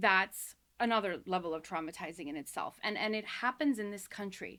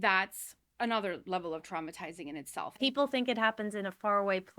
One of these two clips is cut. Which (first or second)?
second